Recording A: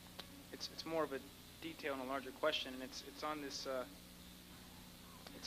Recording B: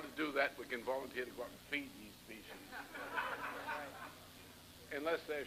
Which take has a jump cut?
A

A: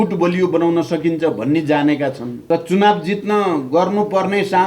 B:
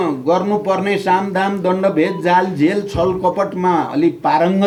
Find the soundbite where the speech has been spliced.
A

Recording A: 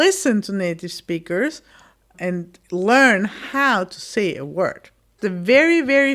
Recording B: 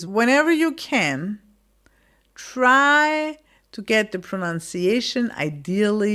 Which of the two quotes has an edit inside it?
A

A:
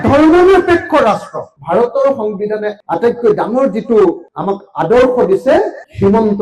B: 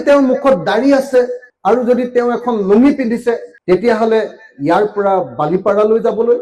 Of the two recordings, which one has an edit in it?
A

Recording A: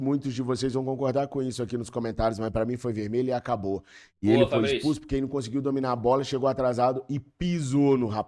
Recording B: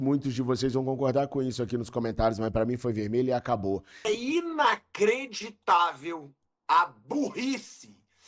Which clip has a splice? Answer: B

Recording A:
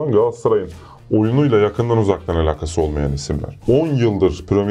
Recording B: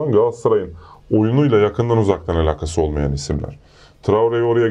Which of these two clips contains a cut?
A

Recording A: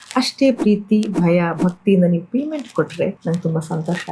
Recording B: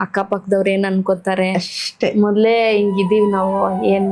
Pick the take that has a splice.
A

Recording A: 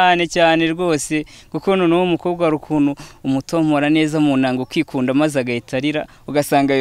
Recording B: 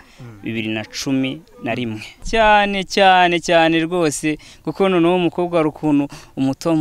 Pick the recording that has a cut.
B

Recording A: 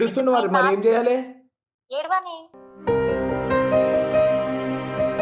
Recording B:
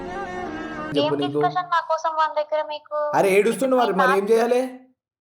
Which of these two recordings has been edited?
B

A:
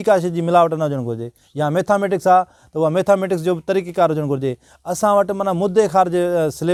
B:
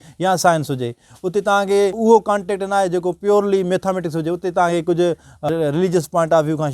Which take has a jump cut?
B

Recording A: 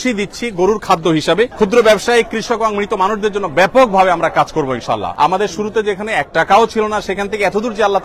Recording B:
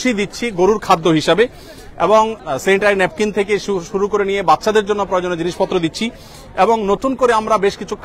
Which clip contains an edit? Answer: A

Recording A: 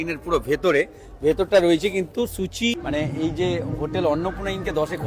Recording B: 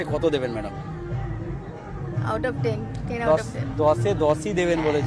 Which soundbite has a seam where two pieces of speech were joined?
A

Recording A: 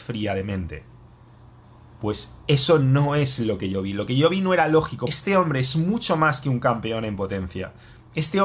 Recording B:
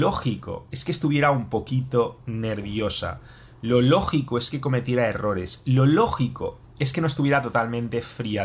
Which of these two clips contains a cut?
A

